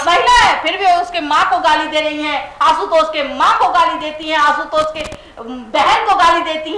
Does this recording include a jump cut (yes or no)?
no